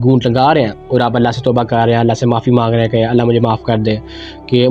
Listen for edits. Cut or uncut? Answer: uncut